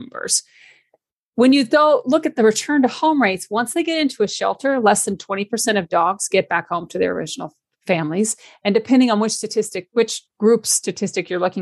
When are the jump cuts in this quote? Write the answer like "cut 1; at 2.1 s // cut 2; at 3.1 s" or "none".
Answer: none

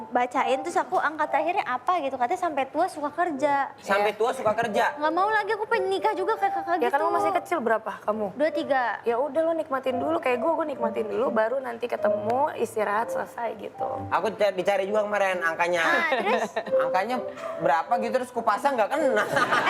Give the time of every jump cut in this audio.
none

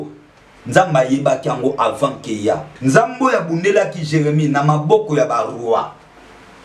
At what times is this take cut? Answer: cut 1; at 2.7 s

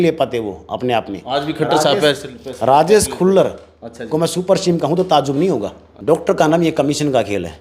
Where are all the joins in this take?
cut 1; at 5.9 s

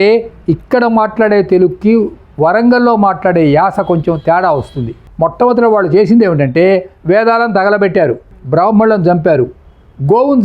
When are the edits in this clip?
cut 1; at 5.0 s

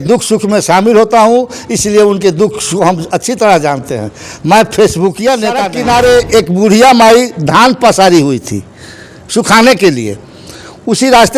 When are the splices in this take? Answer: cut 1; at 5.7 s

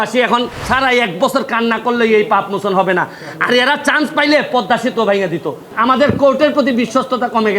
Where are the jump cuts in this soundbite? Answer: cut 1; at 5.6 s

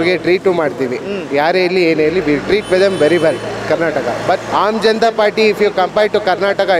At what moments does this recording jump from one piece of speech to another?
cut 1; at 4.5 s

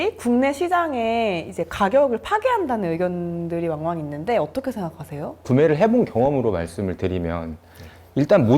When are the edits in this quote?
cut 1; at 5.4 s

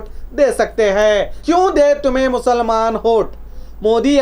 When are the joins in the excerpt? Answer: cut 1; at 1.3 s

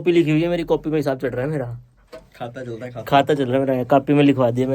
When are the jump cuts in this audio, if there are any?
none

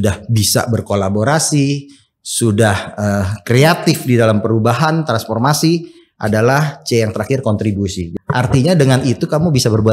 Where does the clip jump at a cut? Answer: cut 1; at 8.0 s

